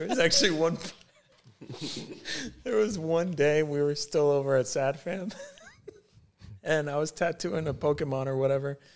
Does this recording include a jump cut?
no; 0 cuts

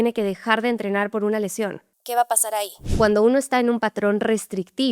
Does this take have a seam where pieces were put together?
yes; 1 cut; at 2.5 s

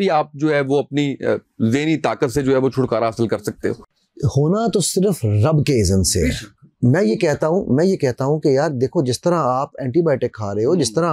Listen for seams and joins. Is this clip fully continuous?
yes; 0 cuts

